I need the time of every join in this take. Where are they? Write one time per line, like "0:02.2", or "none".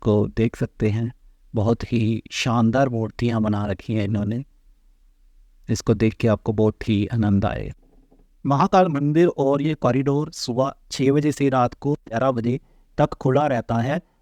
none